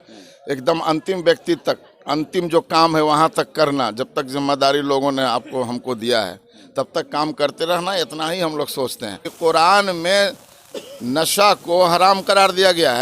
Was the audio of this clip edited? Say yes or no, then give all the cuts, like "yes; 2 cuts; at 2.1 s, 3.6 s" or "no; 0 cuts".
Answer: yes; 1 cut; at 9.3 s